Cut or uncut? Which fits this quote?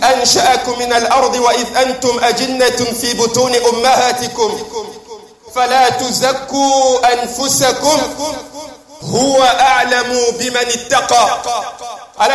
uncut